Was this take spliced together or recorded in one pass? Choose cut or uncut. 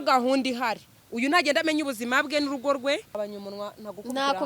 cut